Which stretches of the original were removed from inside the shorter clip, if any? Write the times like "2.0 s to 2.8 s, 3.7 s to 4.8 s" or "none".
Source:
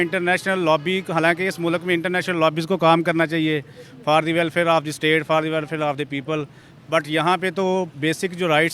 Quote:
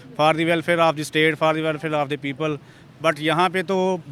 none

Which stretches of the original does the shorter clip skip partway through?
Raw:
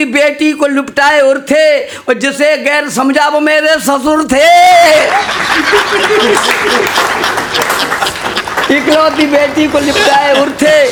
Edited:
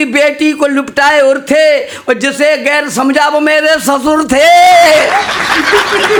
none

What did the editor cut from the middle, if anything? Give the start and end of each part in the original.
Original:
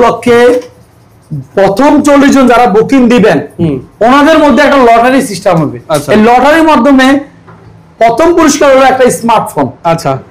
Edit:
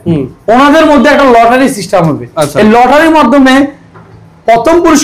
none

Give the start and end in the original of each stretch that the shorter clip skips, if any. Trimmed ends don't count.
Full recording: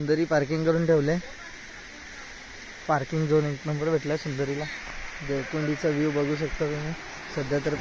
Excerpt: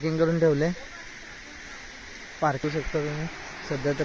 3.1 s to 6.3 s

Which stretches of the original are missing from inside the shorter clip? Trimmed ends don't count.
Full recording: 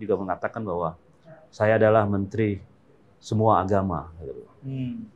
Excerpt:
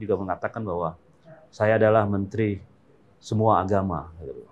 none

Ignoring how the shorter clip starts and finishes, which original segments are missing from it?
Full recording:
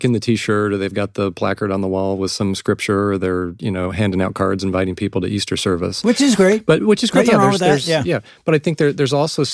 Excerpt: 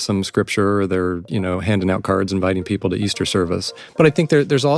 6.0 s to 8.2 s

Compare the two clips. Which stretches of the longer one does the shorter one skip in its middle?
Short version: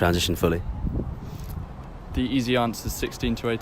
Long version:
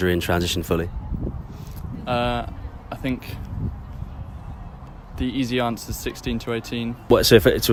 1.9 s to 4.6 s

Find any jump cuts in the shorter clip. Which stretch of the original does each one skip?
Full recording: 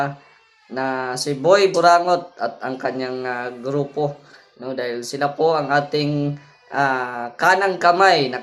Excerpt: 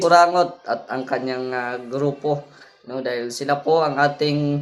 none

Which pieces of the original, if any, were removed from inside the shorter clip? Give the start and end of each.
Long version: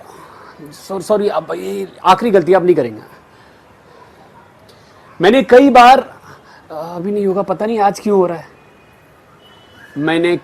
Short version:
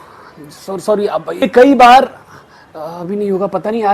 1.6 s to 5.4 s

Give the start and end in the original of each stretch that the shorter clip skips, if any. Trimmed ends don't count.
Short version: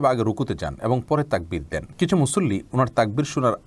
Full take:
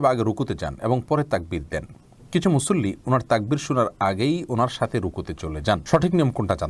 1.8 s to 2.1 s

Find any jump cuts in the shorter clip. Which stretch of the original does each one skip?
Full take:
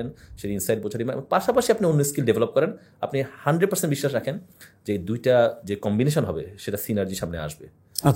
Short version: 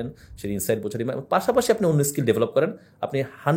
none

